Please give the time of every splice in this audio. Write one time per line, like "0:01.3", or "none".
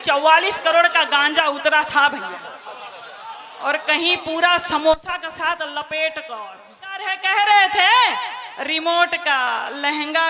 0:07.2